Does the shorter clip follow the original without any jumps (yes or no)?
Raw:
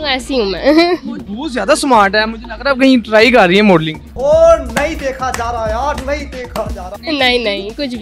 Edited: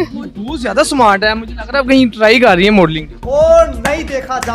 yes